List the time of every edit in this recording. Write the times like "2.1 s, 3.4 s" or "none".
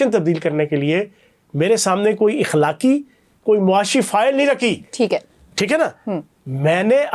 none